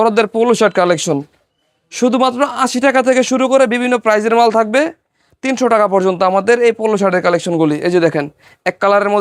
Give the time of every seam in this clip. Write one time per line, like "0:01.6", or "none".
none